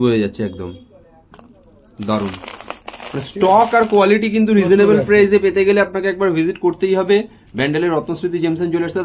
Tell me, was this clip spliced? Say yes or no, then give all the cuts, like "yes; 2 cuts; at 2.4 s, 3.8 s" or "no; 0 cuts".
no; 0 cuts